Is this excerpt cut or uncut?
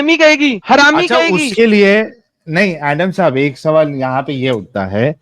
uncut